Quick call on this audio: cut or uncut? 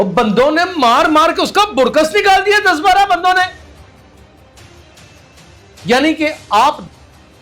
cut